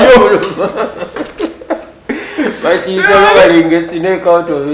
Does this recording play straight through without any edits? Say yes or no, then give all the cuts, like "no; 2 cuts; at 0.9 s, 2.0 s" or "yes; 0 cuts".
yes; 0 cuts